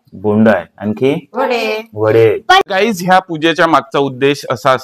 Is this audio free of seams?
no; 1 cut; at 2.6 s

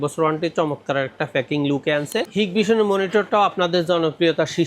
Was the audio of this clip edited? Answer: yes; 1 cut; at 2.3 s

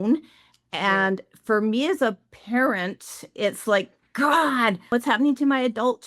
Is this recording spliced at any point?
yes; 1 cut; at 4.9 s

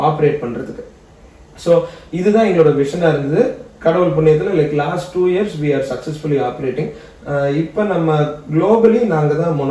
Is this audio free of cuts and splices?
yes; 0 cuts

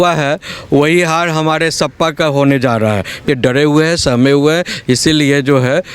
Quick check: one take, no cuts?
no; 1 cut; at 3.3 s

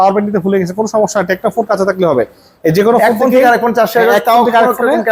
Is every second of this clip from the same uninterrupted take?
yes; 0 cuts

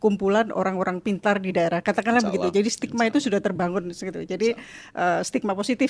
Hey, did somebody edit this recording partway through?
no; 0 cuts

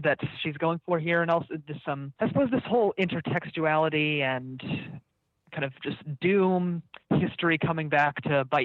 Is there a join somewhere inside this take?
yes; 1 cut; at 2.1 s

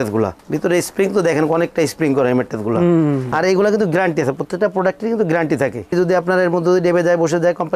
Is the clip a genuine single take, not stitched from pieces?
no; 2 cuts; at 3.3 s, 5.9 s

